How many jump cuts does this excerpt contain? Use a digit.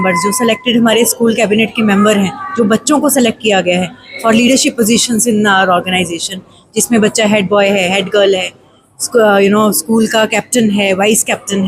0